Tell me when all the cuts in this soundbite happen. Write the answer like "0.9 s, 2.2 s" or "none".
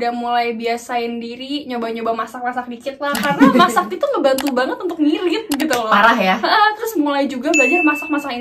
none